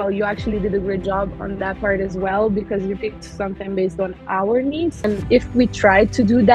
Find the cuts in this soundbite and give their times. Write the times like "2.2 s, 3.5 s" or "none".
5.1 s